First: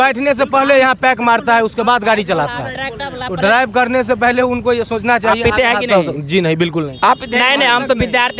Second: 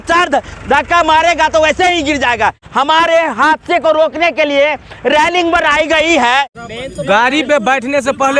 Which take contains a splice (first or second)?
second